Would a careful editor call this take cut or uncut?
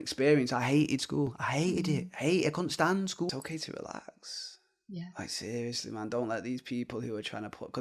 cut